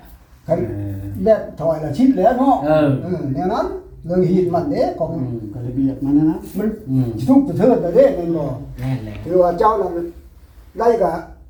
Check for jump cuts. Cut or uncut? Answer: uncut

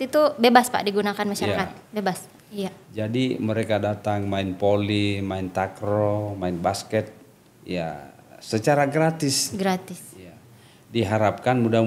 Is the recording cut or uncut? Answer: cut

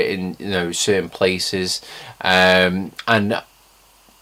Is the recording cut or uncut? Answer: uncut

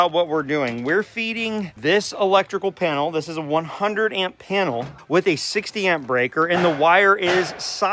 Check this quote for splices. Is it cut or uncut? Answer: cut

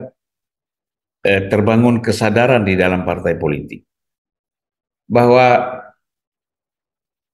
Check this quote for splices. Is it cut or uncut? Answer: uncut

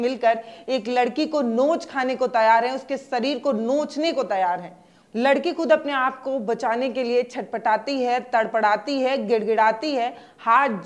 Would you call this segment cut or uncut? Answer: uncut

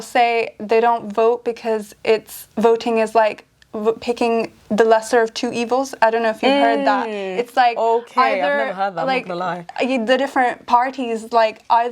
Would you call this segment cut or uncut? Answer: uncut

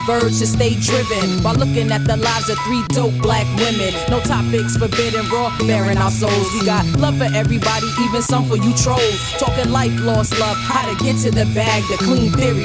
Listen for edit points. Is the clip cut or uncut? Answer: uncut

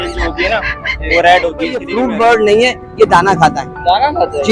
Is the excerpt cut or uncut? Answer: cut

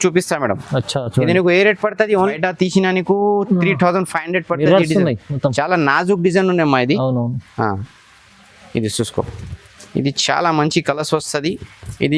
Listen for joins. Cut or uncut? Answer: cut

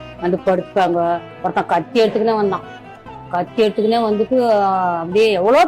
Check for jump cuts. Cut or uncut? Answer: cut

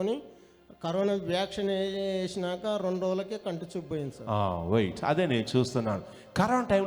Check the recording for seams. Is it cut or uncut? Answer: uncut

